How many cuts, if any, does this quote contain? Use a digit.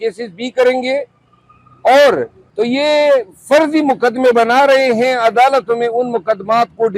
1